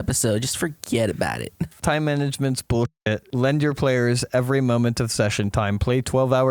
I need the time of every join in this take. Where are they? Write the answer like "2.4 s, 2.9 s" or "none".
1.8 s, 3.2 s